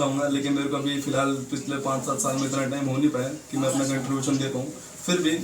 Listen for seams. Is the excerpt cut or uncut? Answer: uncut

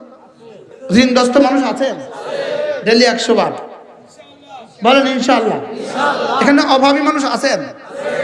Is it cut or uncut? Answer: cut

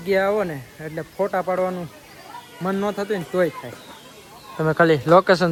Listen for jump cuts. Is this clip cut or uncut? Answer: uncut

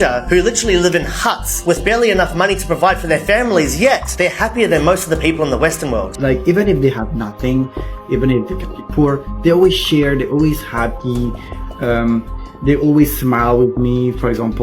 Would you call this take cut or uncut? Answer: cut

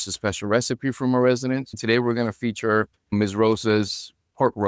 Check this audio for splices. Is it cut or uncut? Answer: cut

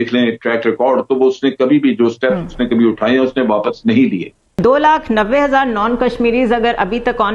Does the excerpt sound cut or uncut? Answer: cut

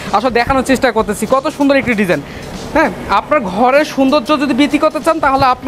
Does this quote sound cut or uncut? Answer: uncut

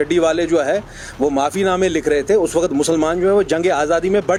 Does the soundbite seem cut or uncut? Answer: uncut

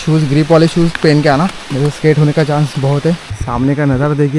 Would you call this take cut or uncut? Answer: cut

